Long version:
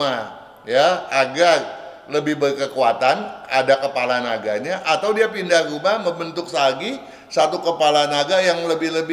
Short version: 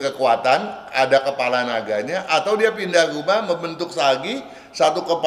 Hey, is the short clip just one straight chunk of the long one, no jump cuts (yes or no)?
yes